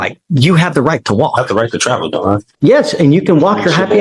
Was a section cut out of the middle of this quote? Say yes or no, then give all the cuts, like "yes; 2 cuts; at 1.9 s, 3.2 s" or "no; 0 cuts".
yes; 1 cut; at 2.5 s